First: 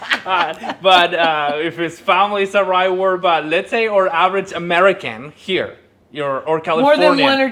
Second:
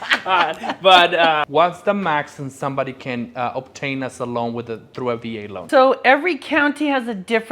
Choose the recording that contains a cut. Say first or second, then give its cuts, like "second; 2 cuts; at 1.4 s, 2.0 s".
second; 2 cuts; at 1.4 s, 5.6 s